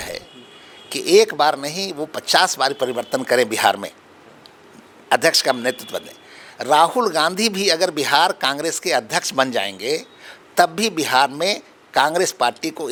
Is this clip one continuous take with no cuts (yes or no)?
yes